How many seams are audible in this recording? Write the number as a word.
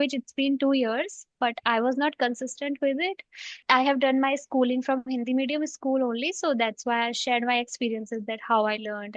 one